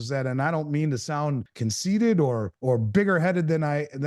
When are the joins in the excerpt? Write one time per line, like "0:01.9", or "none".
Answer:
0:01.5
0:02.5